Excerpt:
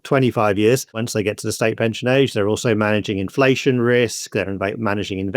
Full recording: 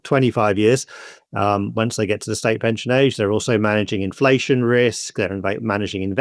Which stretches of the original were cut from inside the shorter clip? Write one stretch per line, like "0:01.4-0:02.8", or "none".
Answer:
0:01.0-0:01.8